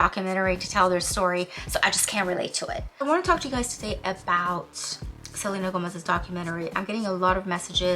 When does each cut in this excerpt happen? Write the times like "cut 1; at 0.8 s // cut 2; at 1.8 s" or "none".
cut 1; at 2.9 s